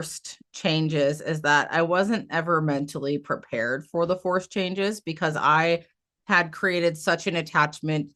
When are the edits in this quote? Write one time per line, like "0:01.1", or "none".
none